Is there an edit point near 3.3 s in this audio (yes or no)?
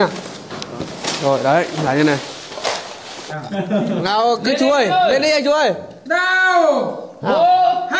yes